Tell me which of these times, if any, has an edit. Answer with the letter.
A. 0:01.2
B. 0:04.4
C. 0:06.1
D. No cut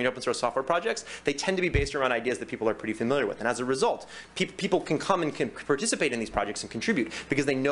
D